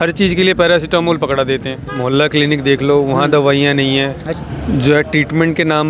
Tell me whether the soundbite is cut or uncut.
cut